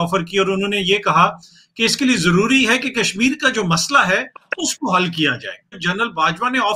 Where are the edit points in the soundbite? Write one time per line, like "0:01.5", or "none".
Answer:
none